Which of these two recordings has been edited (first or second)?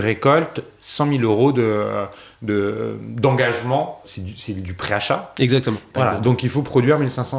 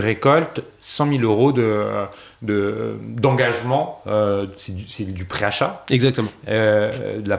first